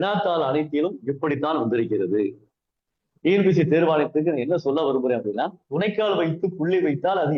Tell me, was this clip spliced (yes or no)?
no